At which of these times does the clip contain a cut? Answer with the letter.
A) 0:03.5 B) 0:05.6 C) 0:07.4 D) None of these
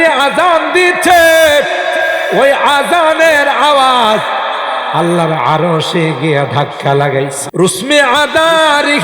C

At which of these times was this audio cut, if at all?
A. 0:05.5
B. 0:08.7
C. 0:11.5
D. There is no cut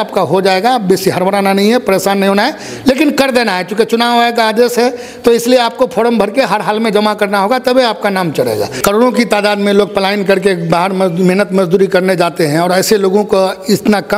B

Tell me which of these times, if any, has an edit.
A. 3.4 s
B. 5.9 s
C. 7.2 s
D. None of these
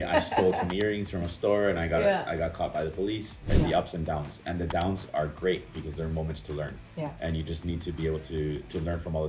A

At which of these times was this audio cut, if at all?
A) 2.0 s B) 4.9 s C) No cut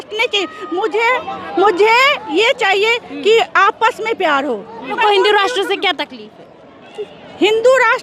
B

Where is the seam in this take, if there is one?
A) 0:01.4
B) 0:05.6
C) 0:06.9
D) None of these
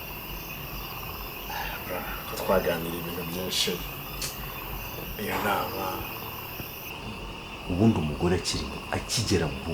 C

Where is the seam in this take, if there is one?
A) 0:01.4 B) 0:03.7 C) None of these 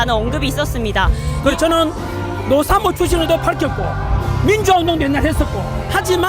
A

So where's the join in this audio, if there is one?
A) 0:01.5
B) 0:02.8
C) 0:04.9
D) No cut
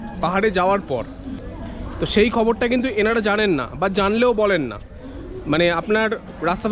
A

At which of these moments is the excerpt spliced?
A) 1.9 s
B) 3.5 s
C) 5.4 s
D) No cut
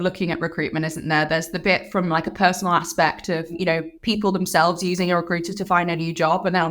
B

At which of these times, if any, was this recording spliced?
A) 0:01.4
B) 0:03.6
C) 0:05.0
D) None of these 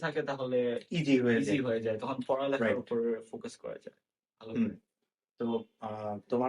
D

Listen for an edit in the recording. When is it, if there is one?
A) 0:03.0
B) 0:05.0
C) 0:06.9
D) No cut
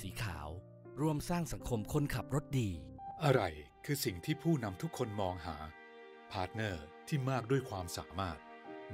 A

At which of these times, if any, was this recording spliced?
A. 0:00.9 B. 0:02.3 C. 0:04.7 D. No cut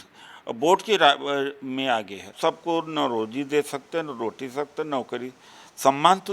B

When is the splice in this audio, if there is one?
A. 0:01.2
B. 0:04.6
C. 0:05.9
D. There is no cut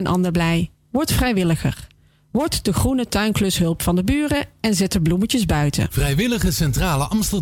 C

